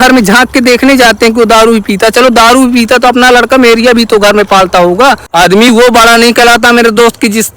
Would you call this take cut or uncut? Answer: cut